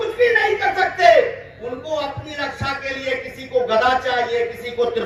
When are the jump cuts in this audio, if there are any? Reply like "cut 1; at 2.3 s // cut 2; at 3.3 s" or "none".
none